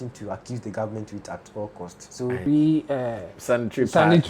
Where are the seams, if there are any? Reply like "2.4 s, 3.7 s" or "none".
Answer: 2.4 s